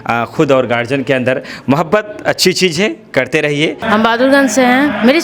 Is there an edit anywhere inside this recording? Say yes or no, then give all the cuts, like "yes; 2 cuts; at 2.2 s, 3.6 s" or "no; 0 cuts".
yes; 1 cut; at 3.8 s